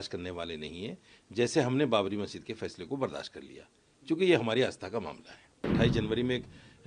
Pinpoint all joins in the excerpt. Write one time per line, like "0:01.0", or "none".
0:05.6